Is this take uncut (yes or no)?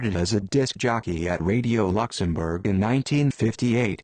no